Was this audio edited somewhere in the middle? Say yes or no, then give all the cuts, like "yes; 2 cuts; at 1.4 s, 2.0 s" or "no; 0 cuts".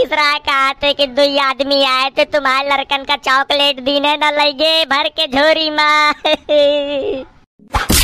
no; 0 cuts